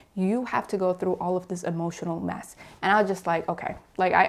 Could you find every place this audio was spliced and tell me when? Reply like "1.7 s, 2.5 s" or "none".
none